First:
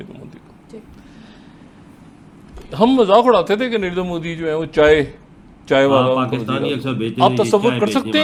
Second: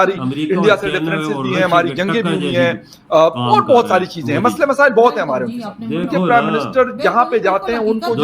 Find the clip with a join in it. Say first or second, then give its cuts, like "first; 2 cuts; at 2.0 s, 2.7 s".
second; 1 cut; at 6.0 s